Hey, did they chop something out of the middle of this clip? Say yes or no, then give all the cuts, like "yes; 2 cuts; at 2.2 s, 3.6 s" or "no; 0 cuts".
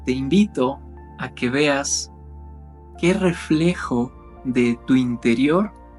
no; 0 cuts